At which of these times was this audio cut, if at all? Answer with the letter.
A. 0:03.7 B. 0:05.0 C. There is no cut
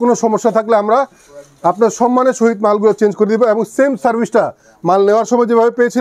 C